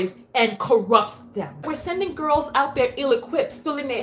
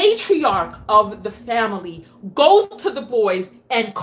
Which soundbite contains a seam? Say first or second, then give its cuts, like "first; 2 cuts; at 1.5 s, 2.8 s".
first; 1 cut; at 1.7 s